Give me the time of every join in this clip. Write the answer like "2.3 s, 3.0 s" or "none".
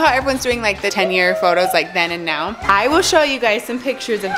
0.9 s, 2.5 s